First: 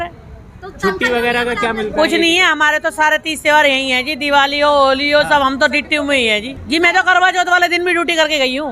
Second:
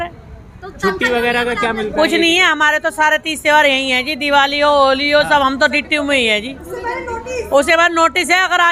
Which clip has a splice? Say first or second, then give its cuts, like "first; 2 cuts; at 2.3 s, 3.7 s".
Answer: first; 1 cut; at 6.5 s